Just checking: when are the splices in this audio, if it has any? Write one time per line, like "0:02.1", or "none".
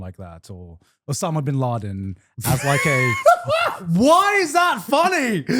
none